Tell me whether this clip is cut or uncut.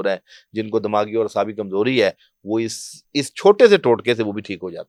uncut